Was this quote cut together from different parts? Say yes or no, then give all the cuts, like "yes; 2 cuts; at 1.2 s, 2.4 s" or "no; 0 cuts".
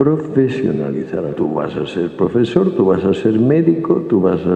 yes; 1 cut; at 1.3 s